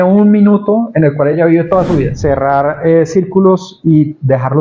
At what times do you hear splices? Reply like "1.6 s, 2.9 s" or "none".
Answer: 2.1 s